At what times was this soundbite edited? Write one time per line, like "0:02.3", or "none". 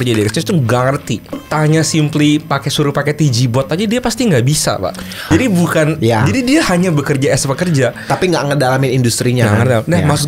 0:01.4
0:05.3